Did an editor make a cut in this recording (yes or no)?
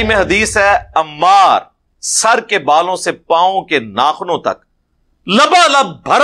no